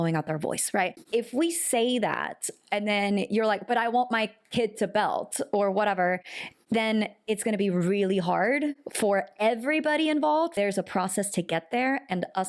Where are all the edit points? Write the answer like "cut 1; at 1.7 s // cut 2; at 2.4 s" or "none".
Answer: cut 1; at 1.0 s // cut 2; at 10.5 s